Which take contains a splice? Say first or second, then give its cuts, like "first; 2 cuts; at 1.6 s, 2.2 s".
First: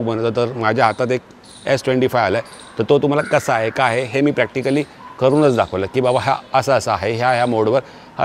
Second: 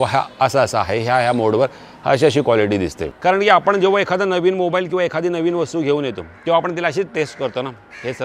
second; 1 cut; at 3.0 s